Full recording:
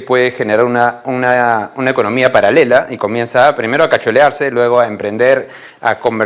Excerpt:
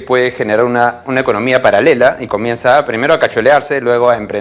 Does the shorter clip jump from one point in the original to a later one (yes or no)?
yes